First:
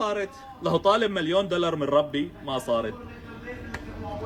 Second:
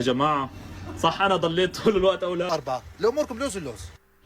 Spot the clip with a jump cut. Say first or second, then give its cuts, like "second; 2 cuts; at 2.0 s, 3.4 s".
second; 1 cut; at 2.5 s